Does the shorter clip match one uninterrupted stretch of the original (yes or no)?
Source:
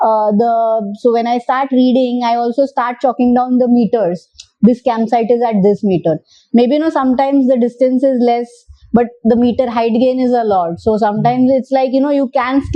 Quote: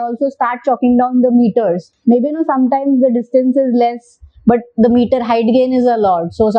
no